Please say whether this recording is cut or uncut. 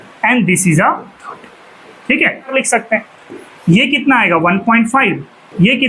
cut